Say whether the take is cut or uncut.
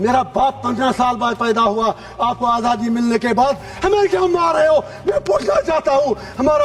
uncut